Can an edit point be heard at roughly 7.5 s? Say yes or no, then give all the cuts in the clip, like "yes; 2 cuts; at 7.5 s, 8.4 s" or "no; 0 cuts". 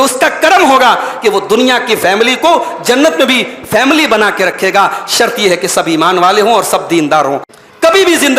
yes; 1 cut; at 7.5 s